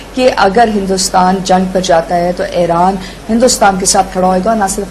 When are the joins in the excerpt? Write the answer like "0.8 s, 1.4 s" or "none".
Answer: none

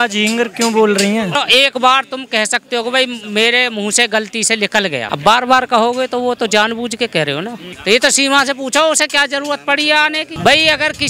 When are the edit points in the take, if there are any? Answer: 1.4 s, 5.1 s, 7.7 s, 10.4 s

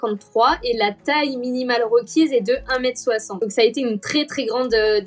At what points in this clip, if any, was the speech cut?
3.4 s

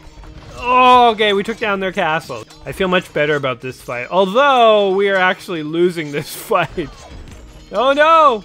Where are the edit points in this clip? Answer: 2.4 s

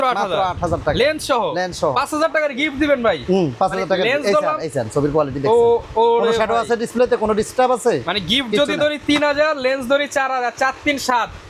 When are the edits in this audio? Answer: none

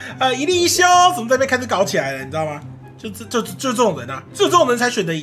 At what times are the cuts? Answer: 4.3 s

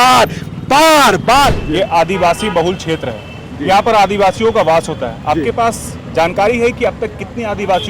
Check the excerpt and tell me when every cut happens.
1.6 s

